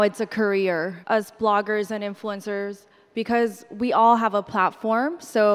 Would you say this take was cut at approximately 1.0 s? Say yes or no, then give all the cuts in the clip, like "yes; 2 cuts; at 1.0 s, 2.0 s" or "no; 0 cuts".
yes; 1 cut; at 1.0 s